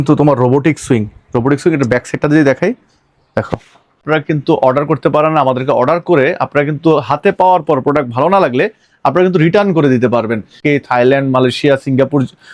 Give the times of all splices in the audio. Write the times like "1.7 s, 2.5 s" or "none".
4.0 s, 10.6 s